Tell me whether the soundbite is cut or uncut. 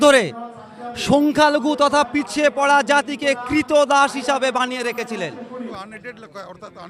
cut